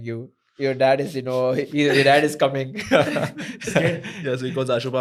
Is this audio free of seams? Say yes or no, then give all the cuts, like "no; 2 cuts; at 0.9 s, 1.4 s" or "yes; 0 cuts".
yes; 0 cuts